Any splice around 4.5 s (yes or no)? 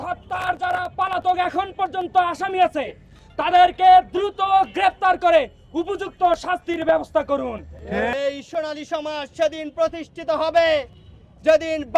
no